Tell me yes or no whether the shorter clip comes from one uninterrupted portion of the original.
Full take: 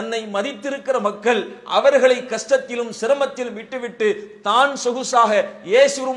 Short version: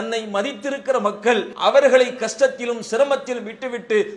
no